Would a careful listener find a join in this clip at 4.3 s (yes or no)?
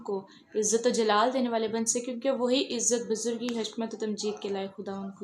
yes